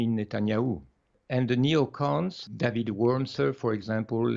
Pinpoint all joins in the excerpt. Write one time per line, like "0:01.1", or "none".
0:01.1